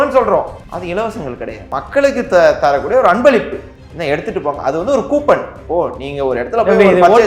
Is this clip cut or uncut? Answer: uncut